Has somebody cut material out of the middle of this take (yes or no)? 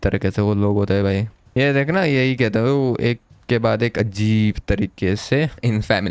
no